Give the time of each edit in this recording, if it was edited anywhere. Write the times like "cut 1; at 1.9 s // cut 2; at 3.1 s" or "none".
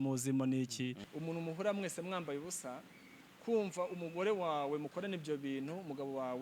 cut 1; at 1.1 s